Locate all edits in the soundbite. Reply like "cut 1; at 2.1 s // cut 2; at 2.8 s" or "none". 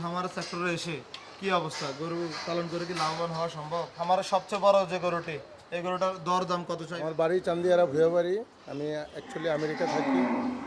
cut 1; at 3.9 s // cut 2; at 7.0 s